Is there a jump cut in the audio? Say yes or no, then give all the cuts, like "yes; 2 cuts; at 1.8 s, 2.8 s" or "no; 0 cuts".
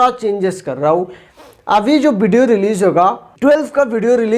yes; 1 cut; at 3.3 s